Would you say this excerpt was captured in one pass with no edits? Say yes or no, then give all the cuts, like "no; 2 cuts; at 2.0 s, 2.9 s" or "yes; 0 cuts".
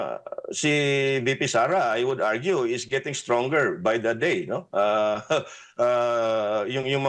yes; 0 cuts